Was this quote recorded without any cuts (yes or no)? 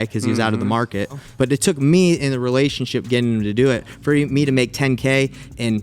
no